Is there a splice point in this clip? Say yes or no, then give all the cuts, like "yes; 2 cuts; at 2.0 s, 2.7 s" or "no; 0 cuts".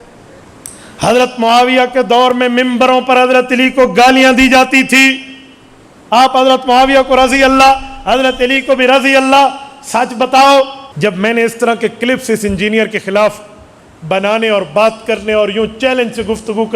yes; 1 cut; at 10.8 s